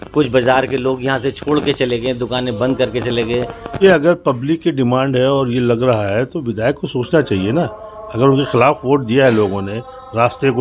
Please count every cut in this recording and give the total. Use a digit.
1